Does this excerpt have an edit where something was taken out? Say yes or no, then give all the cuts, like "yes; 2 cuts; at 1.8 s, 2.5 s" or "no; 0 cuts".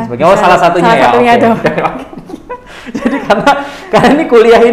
no; 0 cuts